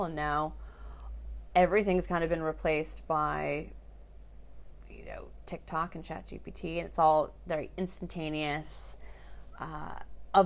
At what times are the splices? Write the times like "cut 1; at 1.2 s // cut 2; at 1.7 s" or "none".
none

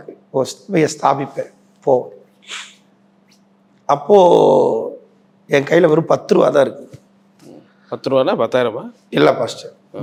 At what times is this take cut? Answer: none

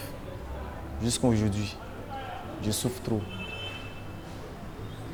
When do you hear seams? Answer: none

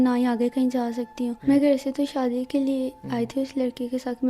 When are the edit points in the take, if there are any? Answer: cut 1; at 1.4 s

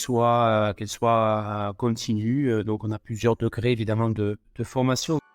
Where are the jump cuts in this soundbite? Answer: cut 1; at 4.5 s

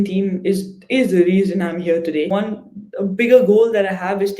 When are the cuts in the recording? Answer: cut 1; at 2.3 s

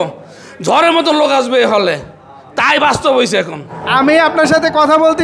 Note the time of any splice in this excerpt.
cut 1; at 3.7 s

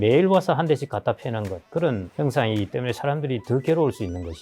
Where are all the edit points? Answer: cut 1; at 1.7 s

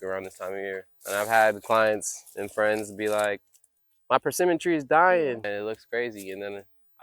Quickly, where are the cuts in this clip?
cut 1; at 0.9 s // cut 2; at 5.4 s

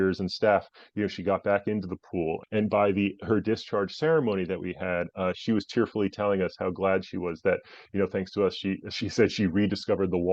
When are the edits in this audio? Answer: cut 1; at 2.4 s

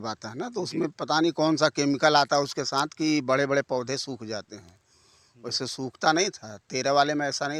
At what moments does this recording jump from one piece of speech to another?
none

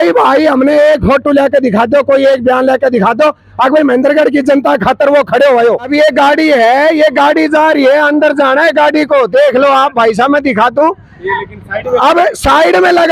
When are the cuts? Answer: cut 1; at 5.9 s

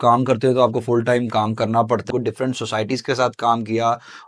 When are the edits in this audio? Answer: cut 1; at 2.1 s

